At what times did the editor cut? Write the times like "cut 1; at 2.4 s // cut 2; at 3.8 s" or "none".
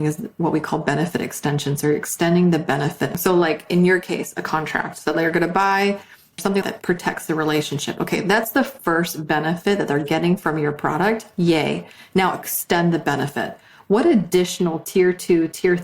cut 1; at 3.1 s // cut 2; at 6.4 s // cut 3; at 13.7 s